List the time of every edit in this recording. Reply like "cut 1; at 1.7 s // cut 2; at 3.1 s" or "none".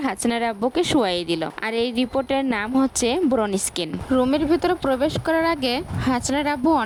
none